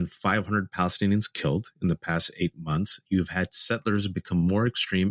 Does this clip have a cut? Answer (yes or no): no